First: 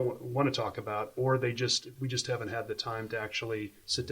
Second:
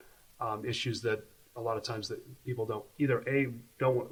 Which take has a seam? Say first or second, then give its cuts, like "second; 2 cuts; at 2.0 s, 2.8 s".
first; 1 cut; at 1.8 s